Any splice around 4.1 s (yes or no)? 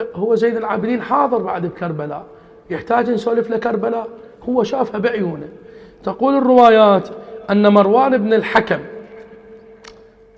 no